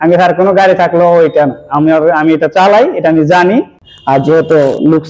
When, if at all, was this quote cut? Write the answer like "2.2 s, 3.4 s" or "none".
3.8 s

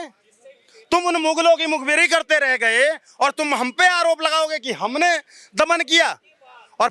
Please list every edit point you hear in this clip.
none

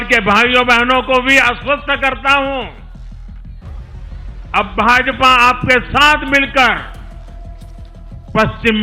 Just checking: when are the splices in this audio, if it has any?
2.8 s, 4.5 s

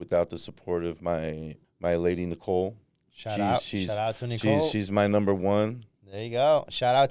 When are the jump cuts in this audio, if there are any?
none

